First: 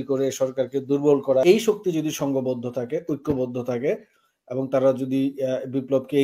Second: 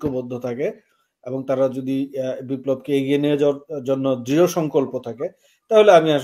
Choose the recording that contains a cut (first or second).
first